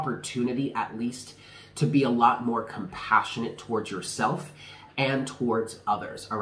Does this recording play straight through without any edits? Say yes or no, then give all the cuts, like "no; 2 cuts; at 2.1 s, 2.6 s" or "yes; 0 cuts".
yes; 0 cuts